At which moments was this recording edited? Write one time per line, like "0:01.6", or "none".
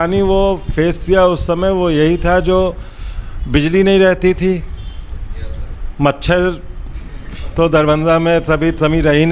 none

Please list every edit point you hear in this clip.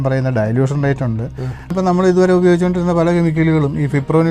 0:01.7

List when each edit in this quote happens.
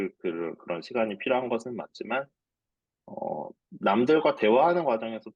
none

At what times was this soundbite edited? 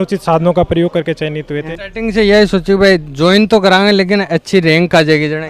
0:01.7

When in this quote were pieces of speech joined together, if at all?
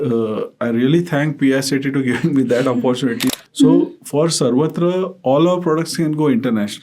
0:03.3

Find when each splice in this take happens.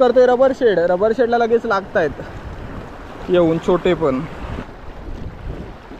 0:04.7

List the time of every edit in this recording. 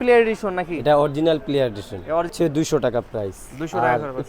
0:02.3

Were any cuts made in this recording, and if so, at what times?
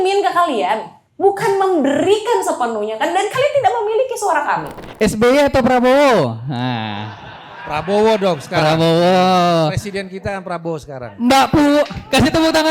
0:04.8

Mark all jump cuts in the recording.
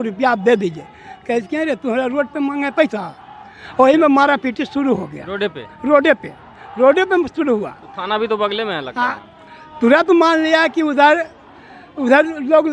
none

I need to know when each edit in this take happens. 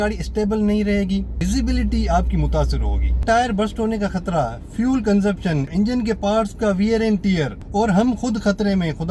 0:01.4
0:03.2
0:05.7
0:07.6

